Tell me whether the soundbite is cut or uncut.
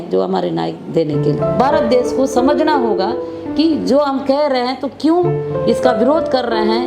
cut